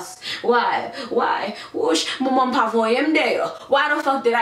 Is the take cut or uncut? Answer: uncut